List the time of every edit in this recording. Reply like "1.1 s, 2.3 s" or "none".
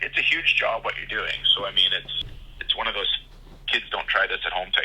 2.1 s